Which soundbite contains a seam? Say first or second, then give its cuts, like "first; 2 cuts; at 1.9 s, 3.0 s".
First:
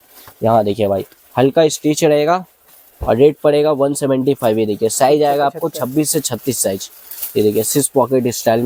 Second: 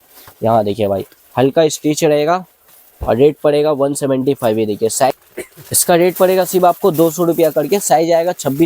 second; 1 cut; at 5.1 s